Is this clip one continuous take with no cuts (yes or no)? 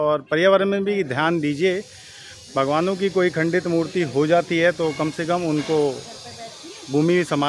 yes